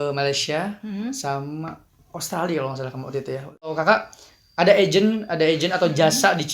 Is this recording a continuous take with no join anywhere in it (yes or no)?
no